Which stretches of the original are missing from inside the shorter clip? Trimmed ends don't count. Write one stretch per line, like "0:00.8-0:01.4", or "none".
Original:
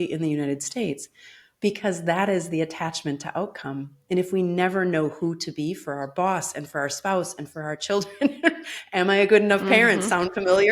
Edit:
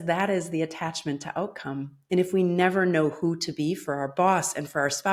none